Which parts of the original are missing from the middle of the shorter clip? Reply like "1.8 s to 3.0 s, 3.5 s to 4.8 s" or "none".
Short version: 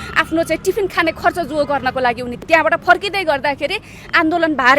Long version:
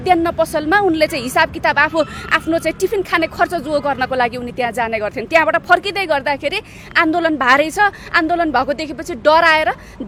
4.5 s to 5.2 s